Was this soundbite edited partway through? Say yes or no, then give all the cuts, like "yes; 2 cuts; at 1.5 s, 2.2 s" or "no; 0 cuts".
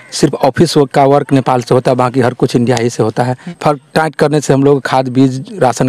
yes; 1 cut; at 3.4 s